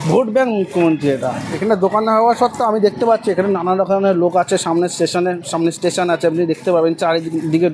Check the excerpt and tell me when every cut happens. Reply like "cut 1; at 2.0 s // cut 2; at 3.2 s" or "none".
none